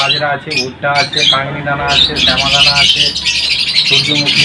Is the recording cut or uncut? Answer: uncut